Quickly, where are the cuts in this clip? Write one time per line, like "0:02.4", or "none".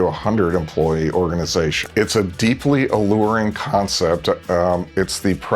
0:01.8